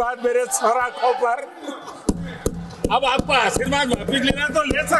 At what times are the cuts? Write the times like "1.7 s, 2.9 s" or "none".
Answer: none